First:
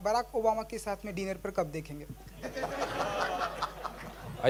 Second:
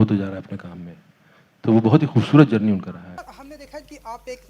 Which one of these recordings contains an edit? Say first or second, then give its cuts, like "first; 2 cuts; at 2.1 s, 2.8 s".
second; 1 cut; at 3.2 s